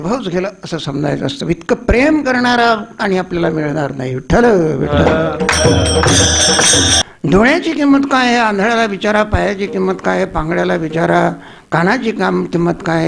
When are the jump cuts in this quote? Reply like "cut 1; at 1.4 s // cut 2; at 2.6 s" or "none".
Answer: cut 1; at 7.0 s